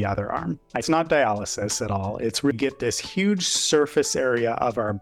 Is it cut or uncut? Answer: cut